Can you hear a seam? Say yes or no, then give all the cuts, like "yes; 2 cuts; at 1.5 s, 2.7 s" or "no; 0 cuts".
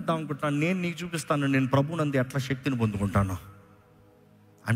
no; 0 cuts